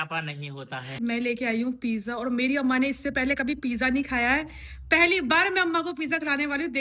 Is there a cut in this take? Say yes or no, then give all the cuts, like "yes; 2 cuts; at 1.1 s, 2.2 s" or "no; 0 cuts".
yes; 1 cut; at 0.9 s